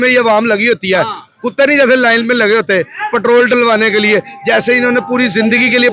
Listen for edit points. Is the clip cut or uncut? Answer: uncut